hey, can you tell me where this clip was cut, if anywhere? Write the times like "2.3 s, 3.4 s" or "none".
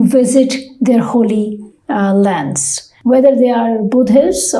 2.9 s